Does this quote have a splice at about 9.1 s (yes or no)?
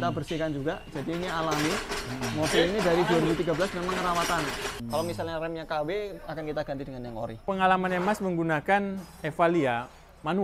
no